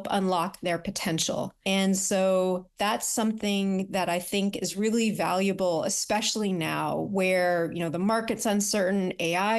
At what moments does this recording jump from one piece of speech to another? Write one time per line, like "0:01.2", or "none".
0:01.6
0:02.7